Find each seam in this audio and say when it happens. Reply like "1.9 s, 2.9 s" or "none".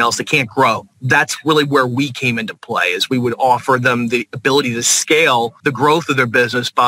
0.9 s, 5.6 s